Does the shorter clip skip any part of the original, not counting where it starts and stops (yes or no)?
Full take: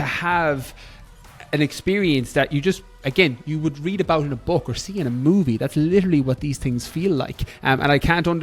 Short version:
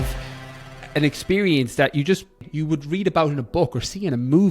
yes